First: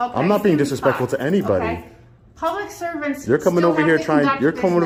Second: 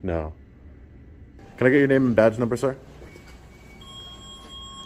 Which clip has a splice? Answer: second; 1 cut; at 1.0 s

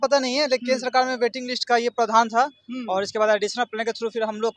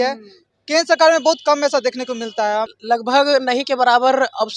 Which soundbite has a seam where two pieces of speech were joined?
second; 1 cut; at 2.8 s

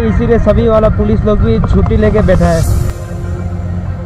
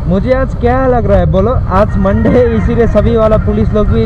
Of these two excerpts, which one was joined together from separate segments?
first; 1 cut; at 2.9 s

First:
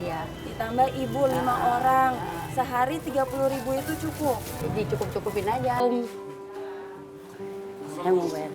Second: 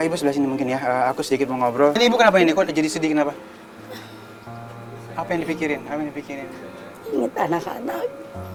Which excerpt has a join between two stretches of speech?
first; 1 cut; at 5.8 s

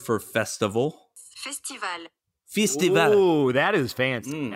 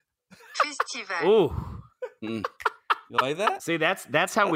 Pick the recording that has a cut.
first; 1 cut; at 1.2 s

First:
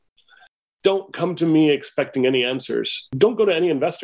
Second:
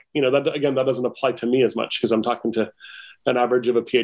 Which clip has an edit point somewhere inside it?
first; 1 cut; at 3.1 s

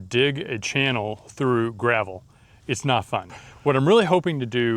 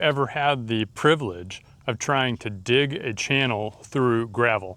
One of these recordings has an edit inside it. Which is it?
first; 1 cut; at 3.4 s

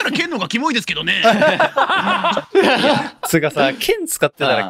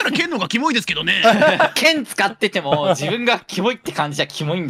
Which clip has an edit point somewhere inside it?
second; 1 cut; at 1.7 s

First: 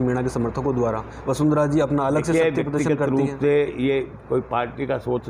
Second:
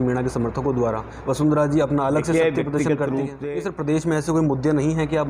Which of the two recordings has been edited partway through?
second; 1 cut; at 3.4 s

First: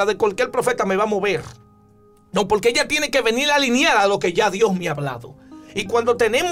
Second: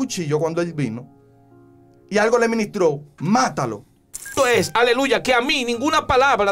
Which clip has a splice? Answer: second; 1 cut; at 4.4 s

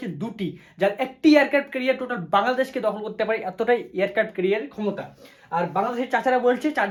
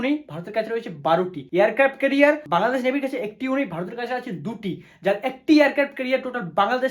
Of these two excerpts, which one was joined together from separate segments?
second; 2 cuts; at 1.4 s, 2.4 s

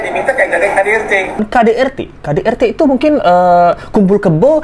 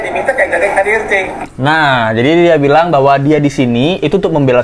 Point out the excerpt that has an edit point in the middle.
first; 1 cut; at 1.4 s

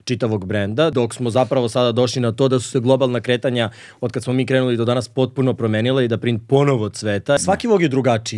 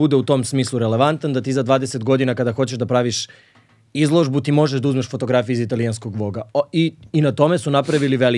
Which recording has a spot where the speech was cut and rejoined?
first; 2 cuts; at 0.9 s, 7.4 s

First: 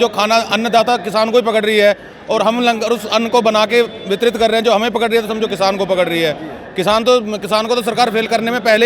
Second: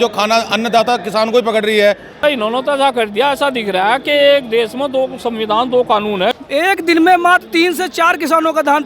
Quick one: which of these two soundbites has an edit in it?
second; 2 cuts; at 2.2 s, 6.3 s

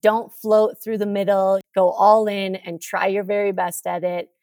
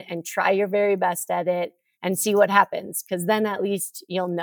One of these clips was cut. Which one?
first; 1 cut; at 1.7 s

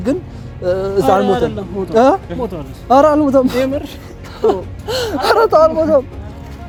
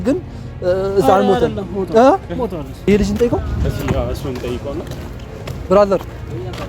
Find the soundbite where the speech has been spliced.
second; 1 cut; at 2.7 s

